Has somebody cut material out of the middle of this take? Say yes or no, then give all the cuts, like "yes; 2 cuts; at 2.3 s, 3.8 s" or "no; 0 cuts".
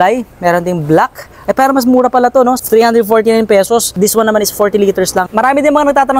yes; 3 cuts; at 2.6 s, 3.9 s, 5.3 s